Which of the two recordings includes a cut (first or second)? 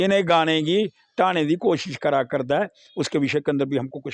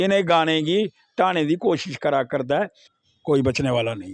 second